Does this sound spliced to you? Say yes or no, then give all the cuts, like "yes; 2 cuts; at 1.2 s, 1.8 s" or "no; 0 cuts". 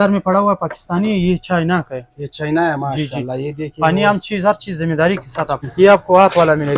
yes; 1 cut; at 5.6 s